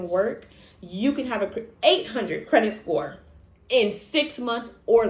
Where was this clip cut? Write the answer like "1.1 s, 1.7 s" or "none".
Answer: none